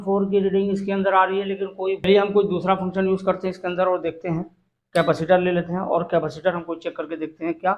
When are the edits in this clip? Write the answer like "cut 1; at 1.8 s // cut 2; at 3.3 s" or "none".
cut 1; at 2.1 s